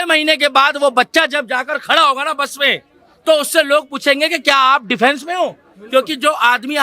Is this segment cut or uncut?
uncut